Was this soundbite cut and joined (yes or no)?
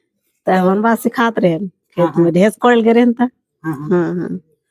no